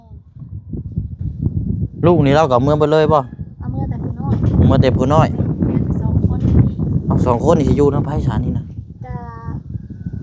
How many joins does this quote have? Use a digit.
1